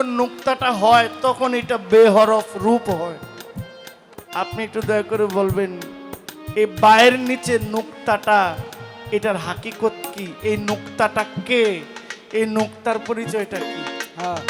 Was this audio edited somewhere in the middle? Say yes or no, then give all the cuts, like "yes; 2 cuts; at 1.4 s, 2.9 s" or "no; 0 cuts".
no; 0 cuts